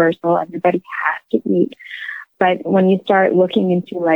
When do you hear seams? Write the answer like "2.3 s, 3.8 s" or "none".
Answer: 2.3 s